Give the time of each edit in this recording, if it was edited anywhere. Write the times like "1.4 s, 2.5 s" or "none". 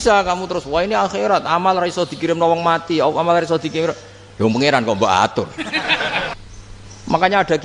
6.3 s